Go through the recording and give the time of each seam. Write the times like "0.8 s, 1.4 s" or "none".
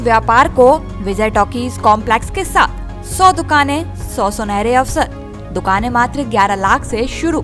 none